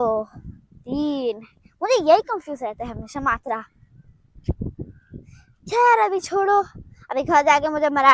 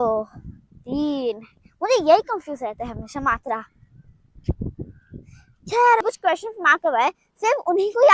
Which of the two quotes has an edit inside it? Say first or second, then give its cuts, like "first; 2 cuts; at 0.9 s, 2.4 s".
second; 1 cut; at 6.0 s